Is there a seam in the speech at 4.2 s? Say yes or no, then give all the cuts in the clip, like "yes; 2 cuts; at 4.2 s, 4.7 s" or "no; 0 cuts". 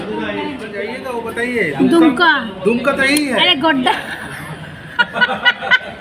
no; 1 cut; at 1.0 s